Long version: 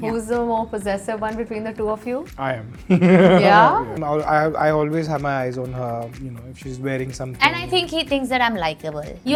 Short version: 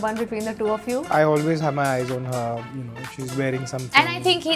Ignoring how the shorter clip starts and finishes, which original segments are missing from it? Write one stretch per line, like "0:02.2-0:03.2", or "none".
0:02.3-0:04.6